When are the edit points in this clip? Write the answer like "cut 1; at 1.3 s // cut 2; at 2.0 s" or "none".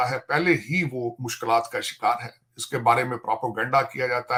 none